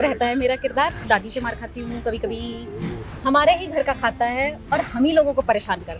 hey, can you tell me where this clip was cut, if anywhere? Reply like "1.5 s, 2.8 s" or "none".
1.0 s, 3.1 s